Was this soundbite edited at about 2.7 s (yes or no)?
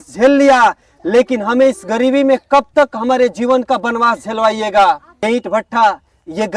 no